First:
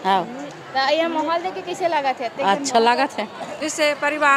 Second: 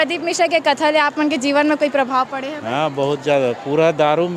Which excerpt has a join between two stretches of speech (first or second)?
first